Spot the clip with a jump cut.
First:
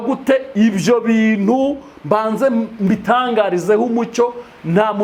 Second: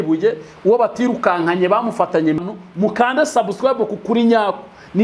second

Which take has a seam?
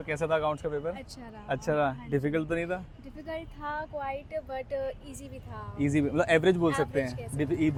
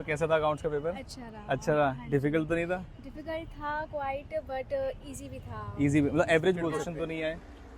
second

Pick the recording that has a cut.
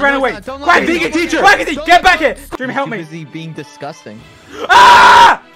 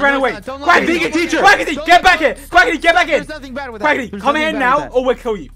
first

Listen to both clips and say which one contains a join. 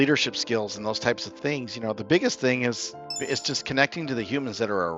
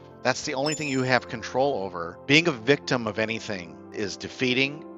second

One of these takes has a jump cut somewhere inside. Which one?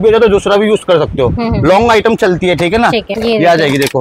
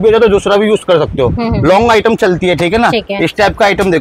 first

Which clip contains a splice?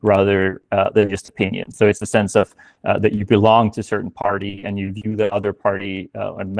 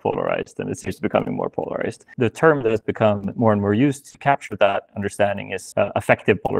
second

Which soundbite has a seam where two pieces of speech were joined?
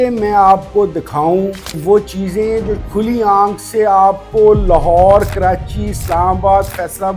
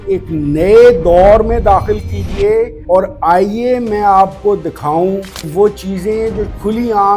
second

